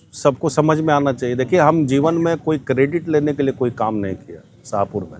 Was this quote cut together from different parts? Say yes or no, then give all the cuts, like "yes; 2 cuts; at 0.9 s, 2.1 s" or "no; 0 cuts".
no; 0 cuts